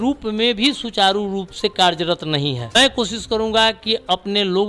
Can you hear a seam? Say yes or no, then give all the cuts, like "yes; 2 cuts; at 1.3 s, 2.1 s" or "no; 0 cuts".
yes; 1 cut; at 2.7 s